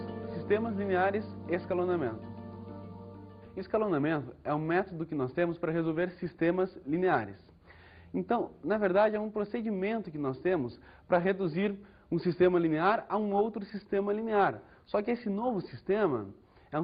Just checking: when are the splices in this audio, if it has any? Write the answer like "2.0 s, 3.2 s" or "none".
15.0 s